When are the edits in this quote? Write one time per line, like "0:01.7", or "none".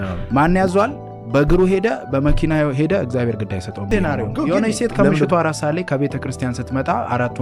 0:03.9

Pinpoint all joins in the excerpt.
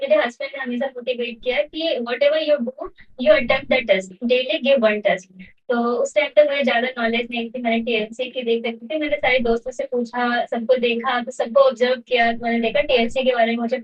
none

